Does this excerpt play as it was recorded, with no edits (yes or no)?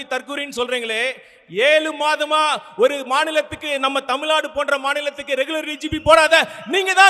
yes